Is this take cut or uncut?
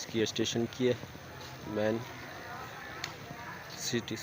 uncut